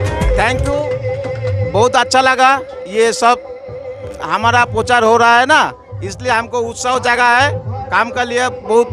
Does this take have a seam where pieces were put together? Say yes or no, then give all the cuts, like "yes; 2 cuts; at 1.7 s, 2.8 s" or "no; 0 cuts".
no; 0 cuts